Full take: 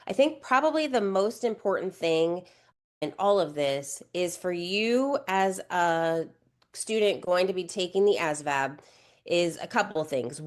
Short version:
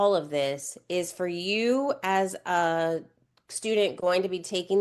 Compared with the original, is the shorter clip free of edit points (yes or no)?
yes